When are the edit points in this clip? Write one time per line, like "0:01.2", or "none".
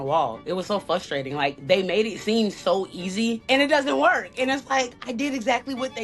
0:03.4